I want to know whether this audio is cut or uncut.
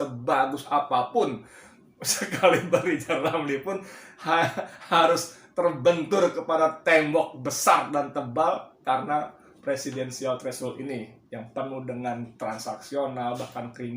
uncut